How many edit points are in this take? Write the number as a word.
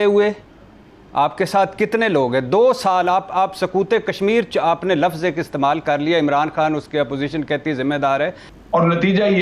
one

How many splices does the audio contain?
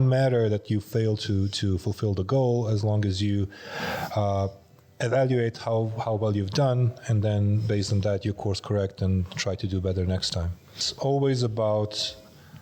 one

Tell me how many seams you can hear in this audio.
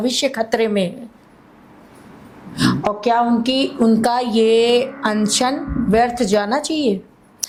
zero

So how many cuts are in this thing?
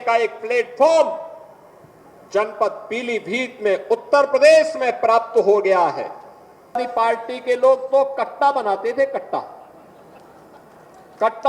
one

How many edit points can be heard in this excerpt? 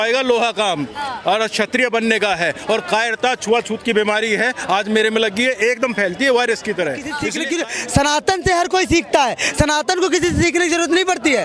one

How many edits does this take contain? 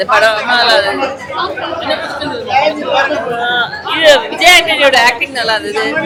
zero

